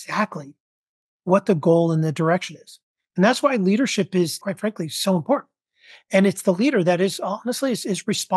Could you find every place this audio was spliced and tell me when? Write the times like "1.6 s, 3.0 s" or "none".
4.4 s